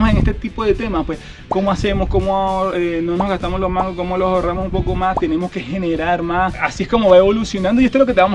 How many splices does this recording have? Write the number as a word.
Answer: one